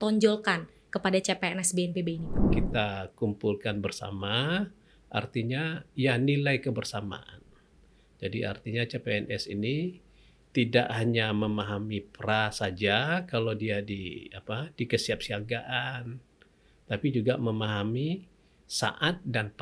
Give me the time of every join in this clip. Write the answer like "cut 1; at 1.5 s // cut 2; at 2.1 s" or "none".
cut 1; at 2.4 s